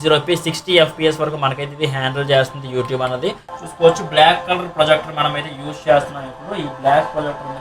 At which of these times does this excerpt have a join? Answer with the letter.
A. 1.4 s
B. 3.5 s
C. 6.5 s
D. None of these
B